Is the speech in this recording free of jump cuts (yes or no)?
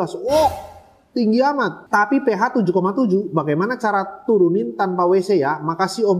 yes